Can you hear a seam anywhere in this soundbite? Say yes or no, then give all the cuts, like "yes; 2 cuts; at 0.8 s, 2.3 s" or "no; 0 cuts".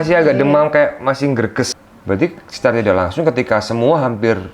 yes; 1 cut; at 1.7 s